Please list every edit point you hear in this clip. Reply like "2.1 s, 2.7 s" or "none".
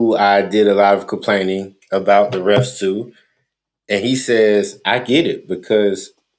none